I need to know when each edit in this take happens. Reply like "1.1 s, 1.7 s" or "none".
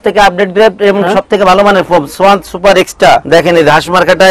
3.2 s